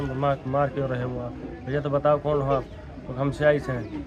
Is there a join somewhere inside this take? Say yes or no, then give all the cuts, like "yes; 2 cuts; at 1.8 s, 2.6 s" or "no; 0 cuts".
no; 0 cuts